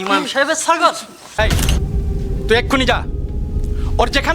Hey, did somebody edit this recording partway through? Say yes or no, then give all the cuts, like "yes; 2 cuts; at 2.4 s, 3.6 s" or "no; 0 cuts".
yes; 1 cut; at 1.4 s